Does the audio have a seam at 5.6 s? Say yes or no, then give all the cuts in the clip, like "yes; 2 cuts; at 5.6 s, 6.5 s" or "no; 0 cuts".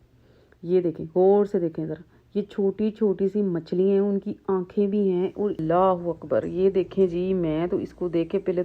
yes; 1 cut; at 5.6 s